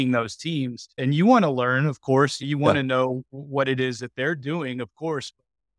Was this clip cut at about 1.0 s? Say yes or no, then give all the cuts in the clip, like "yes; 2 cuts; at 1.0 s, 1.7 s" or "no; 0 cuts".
yes; 2 cuts; at 1.0 s, 2.4 s